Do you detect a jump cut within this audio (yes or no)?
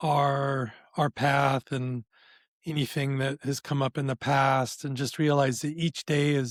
no